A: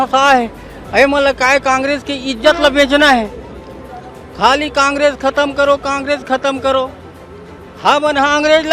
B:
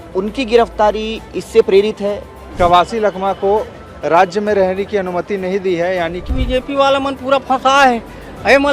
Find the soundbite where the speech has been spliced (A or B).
B